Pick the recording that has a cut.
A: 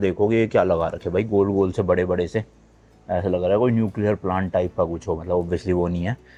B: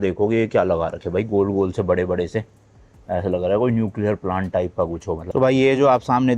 B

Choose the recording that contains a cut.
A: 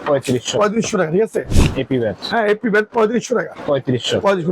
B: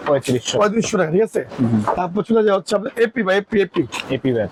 A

